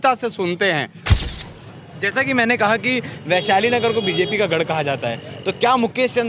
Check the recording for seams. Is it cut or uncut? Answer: cut